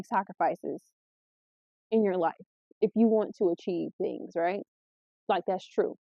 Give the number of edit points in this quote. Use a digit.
0